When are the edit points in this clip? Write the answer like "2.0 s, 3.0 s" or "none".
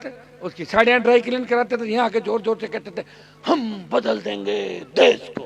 none